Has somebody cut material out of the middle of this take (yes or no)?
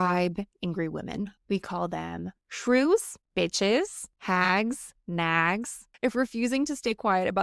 yes